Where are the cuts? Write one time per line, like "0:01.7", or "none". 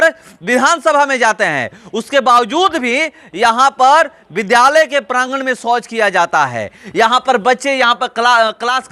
none